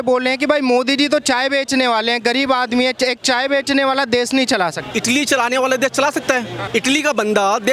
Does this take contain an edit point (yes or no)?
yes